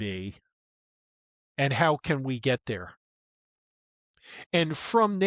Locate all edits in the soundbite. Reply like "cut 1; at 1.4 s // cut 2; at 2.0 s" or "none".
none